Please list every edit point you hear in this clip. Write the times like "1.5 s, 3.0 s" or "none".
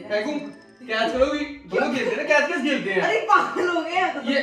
none